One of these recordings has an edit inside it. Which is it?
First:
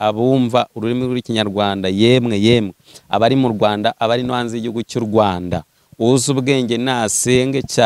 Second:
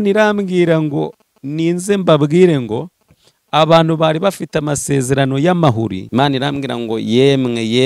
second; 1 cut; at 6.0 s

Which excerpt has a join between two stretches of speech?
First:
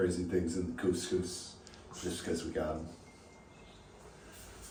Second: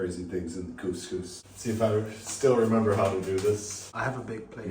second; 2 cuts; at 1.4 s, 3.8 s

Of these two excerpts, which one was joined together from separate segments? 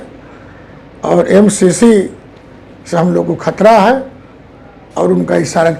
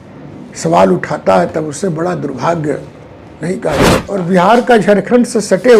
second; 1 cut; at 3.9 s

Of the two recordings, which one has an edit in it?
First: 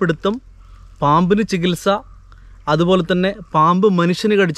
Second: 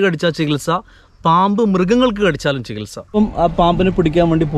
second; 1 cut; at 3.2 s

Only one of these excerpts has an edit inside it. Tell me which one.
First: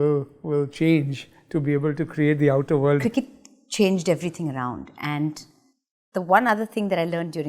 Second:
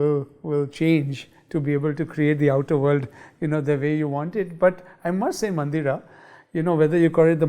first; 1 cut; at 3.0 s

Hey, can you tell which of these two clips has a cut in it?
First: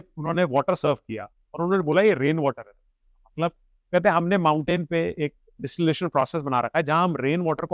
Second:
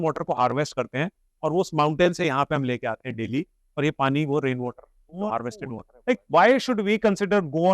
second; 1 cut; at 5.9 s

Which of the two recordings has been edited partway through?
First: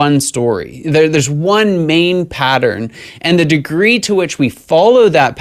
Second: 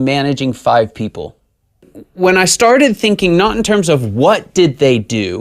second; 1 cut; at 2.0 s

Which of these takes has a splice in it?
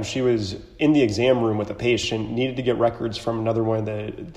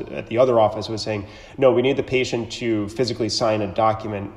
first; 1 cut; at 2.1 s

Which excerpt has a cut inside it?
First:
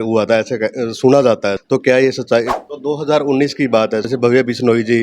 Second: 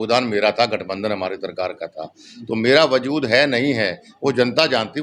first; 3 cuts; at 1.6 s, 2.6 s, 4.1 s

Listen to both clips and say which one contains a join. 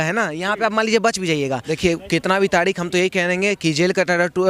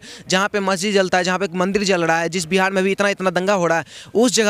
first; 1 cut; at 1.7 s

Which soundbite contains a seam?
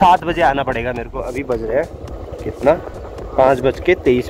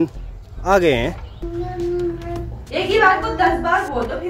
second; 1 cut; at 1.5 s

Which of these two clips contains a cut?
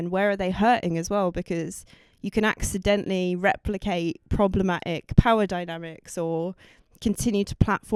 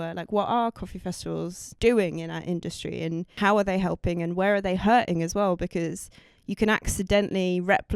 second; 2 cuts; at 1.6 s, 3.3 s

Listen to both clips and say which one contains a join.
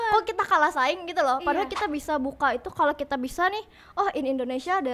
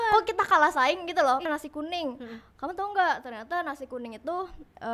second; 1 cut; at 1.5 s

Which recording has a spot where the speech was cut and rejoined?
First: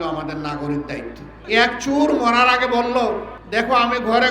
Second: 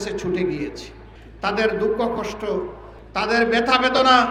first; 2 cuts; at 1.4 s, 3.3 s

